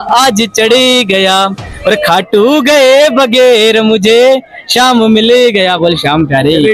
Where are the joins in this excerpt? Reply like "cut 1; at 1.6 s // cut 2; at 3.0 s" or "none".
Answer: none